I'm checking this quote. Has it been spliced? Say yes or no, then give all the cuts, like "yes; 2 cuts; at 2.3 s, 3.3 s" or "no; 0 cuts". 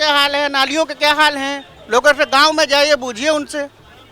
no; 0 cuts